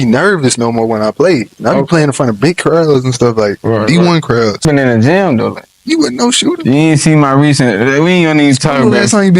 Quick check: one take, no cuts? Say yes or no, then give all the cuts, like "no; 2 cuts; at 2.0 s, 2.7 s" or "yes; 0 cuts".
no; 1 cut; at 4.7 s